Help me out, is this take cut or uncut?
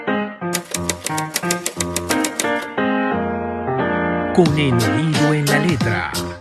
uncut